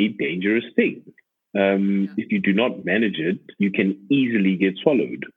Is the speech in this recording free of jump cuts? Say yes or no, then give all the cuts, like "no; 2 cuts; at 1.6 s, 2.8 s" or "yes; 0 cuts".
no; 1 cut; at 3.5 s